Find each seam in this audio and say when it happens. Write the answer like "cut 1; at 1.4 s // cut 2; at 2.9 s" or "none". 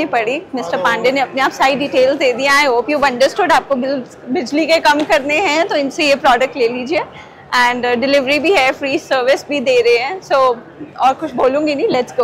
none